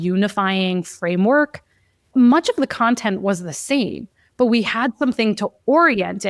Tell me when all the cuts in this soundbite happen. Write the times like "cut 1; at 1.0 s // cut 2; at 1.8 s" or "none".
cut 1; at 2.1 s